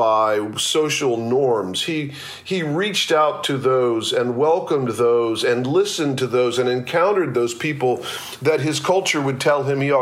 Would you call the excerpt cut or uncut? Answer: uncut